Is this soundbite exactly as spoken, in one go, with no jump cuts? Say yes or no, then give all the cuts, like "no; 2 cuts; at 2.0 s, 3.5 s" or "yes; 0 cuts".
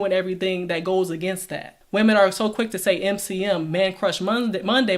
no; 1 cut; at 1.8 s